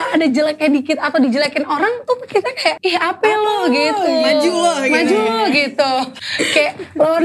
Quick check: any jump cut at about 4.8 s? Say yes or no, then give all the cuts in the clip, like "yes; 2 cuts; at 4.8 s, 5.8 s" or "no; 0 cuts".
no; 2 cuts; at 2.8 s, 6.2 s